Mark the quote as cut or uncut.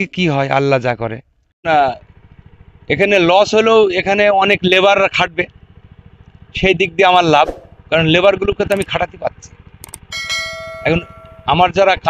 cut